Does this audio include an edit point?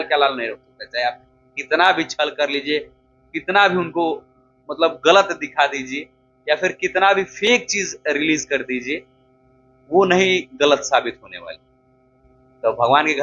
no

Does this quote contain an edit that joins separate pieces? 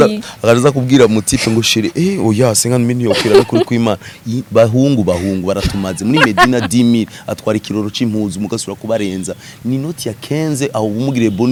no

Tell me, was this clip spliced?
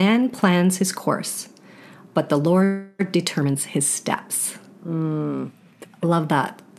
no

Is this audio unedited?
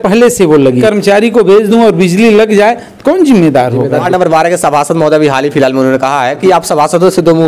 no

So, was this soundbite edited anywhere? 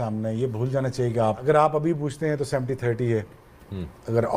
yes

